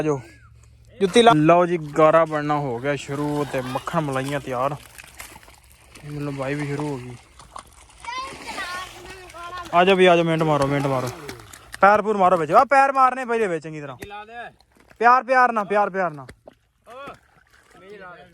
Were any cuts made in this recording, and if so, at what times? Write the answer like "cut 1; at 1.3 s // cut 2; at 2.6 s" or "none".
cut 1; at 1.3 s